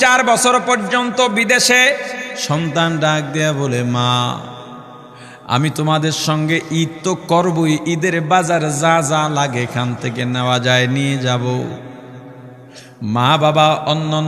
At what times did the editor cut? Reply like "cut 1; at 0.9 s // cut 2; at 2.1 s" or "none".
cut 1; at 2.3 s

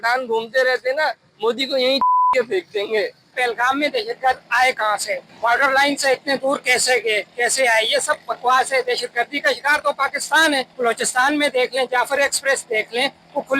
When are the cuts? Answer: cut 1; at 3.3 s // cut 2; at 5.3 s // cut 3; at 10.7 s

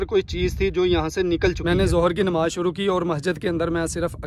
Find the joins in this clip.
cut 1; at 1.6 s

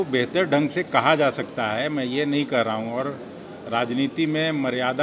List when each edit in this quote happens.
none

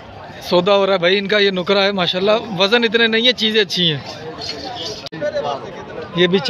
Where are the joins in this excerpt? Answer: cut 1; at 5.1 s

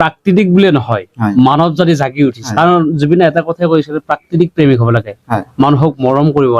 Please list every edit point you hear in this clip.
cut 1; at 2.4 s

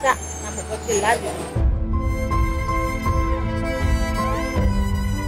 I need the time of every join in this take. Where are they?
none

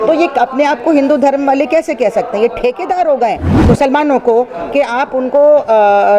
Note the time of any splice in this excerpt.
cut 1; at 3.5 s

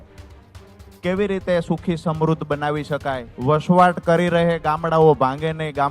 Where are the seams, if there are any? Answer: cut 1; at 3.3 s

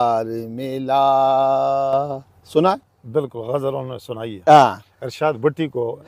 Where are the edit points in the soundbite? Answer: none

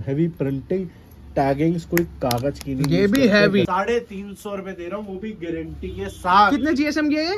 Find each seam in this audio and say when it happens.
cut 1; at 3.7 s

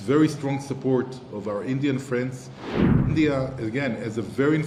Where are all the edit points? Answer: none

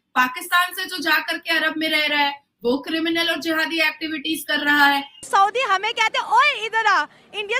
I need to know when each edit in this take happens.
cut 1; at 5.3 s

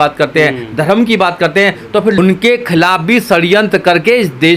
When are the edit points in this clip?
cut 1; at 2.1 s

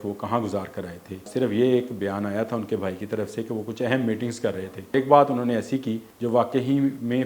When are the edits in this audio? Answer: cut 1; at 1.3 s // cut 2; at 4.9 s // cut 3; at 6.1 s

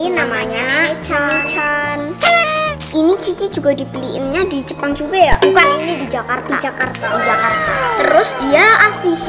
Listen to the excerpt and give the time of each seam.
none

